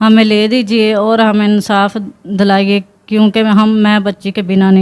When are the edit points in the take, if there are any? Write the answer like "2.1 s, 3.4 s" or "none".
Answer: none